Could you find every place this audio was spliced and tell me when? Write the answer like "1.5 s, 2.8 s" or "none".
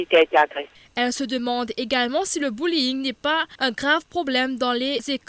3.6 s